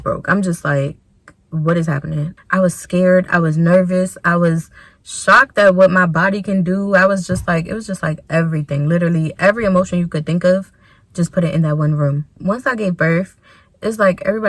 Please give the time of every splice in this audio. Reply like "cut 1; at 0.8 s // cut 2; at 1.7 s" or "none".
cut 1; at 2.4 s // cut 2; at 12.3 s